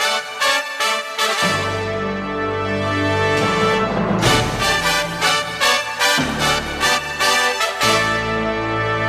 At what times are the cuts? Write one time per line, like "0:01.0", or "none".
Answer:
0:07.5